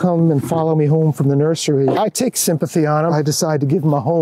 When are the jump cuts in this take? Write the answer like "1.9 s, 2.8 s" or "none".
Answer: 2.0 s, 3.1 s